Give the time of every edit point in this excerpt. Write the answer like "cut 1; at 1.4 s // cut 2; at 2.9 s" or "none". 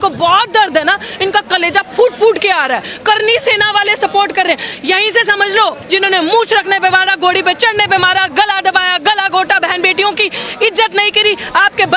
cut 1; at 5.8 s